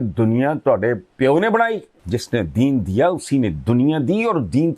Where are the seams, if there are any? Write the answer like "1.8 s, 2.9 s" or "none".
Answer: 1.9 s